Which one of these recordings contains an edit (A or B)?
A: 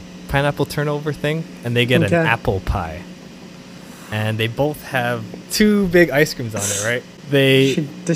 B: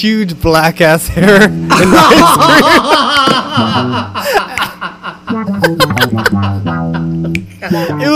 A